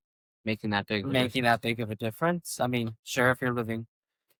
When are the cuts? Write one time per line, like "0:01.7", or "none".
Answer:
none